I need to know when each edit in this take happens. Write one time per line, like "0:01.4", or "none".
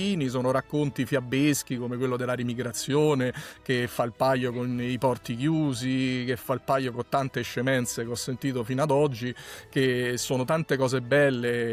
none